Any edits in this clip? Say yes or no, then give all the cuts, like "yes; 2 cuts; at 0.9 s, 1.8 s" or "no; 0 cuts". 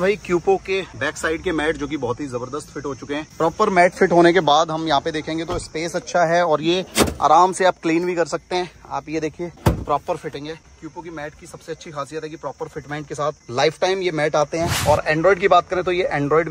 no; 0 cuts